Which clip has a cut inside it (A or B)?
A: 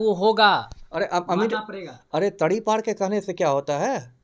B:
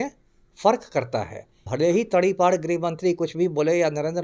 B